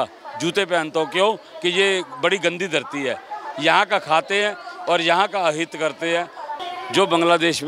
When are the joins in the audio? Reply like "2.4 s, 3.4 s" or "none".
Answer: 6.5 s